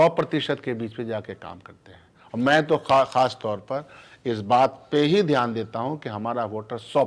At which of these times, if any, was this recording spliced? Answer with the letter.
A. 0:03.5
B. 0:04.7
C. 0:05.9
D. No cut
D